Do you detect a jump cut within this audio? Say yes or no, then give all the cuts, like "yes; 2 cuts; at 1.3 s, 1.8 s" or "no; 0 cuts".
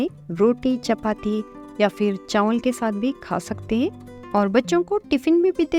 no; 0 cuts